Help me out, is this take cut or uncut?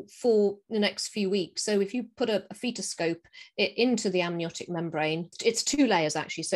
uncut